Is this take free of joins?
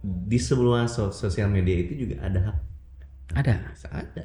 yes; 0 cuts

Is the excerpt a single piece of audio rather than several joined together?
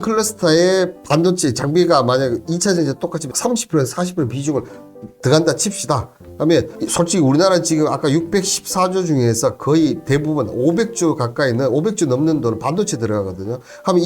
no; 1 cut; at 1.0 s

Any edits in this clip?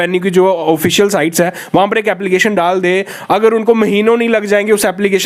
no; 0 cuts

